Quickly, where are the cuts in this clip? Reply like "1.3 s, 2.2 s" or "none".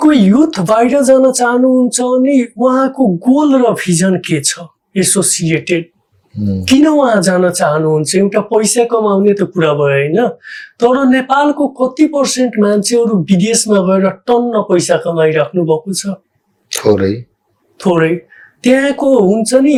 none